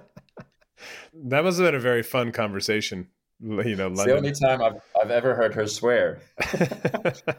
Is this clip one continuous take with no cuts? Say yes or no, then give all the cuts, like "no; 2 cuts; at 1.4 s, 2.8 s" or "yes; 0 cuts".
no; 1 cut; at 6.3 s